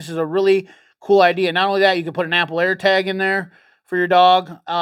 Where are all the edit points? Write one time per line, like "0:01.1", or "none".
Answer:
none